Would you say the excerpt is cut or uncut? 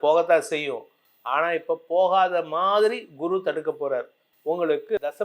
uncut